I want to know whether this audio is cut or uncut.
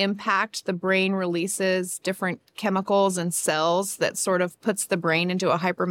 uncut